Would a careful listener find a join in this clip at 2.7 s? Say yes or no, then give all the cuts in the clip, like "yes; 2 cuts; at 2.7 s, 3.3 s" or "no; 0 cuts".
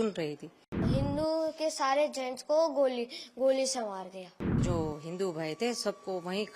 no; 2 cuts; at 0.9 s, 4.6 s